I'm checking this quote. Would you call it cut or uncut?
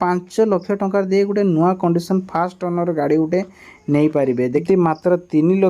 cut